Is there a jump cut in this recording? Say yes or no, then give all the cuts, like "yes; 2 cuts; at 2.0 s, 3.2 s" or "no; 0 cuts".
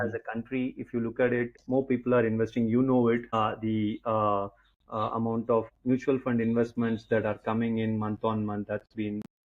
yes; 3 cuts; at 1.6 s, 3.3 s, 5.7 s